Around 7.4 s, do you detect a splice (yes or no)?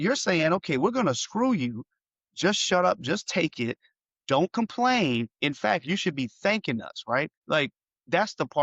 yes